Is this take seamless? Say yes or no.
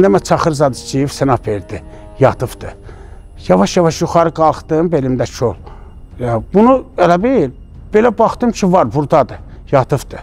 yes